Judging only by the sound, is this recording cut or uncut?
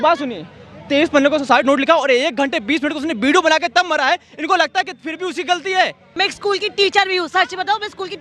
cut